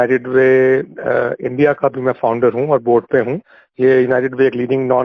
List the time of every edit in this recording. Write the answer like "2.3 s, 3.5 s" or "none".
0.9 s